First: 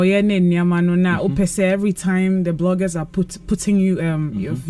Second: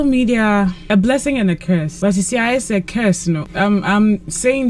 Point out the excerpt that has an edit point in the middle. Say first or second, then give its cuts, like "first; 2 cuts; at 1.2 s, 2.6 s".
second; 3 cuts; at 0.8 s, 1.9 s, 3.5 s